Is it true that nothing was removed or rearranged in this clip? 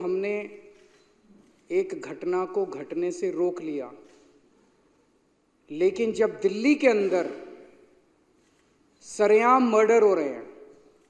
yes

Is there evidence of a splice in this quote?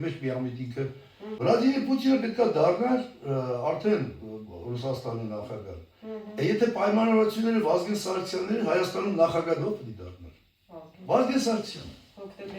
yes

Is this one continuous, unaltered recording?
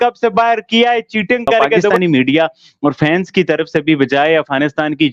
no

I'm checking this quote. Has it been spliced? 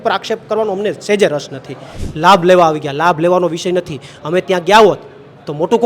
yes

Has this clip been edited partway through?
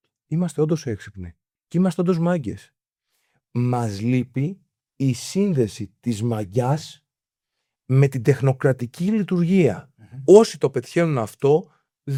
no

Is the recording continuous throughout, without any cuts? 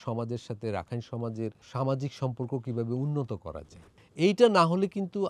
yes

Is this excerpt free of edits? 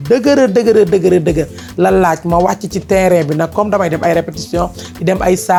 yes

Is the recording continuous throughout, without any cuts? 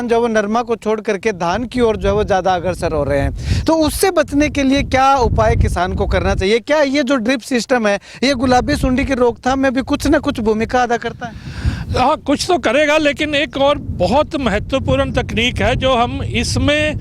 yes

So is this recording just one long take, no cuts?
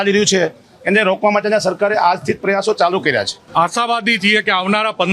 no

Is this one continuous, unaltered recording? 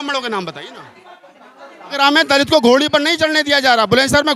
no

